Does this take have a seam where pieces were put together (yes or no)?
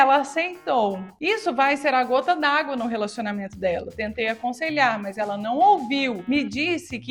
no